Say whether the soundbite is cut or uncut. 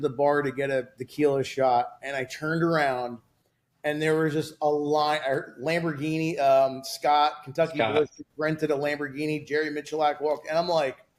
uncut